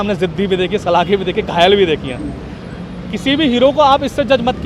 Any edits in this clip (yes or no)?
no